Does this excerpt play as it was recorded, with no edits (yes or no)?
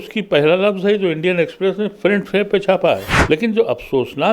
no